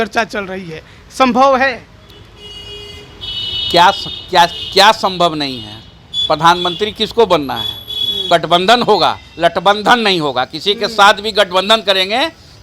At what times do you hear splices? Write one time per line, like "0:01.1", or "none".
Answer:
0:08.2

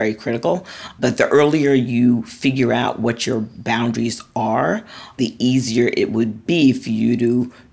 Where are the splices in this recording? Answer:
0:05.2
0:06.4

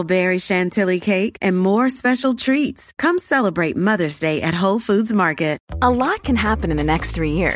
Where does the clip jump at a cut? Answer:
0:05.7

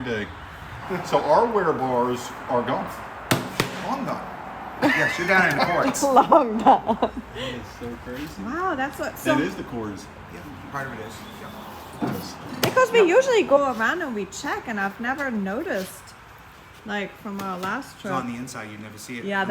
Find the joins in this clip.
none

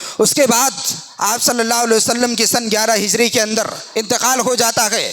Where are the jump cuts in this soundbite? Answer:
0:03.8

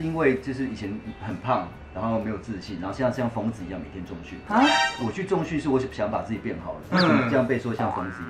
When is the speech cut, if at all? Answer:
none

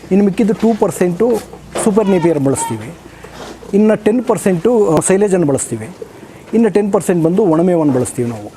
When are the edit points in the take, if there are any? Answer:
0:05.0

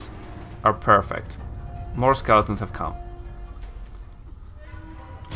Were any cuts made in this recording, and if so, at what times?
none

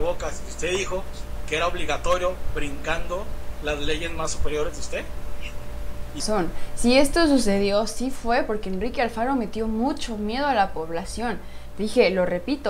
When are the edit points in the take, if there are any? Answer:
0:06.2

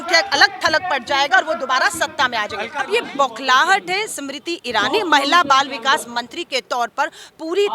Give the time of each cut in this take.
0:02.7

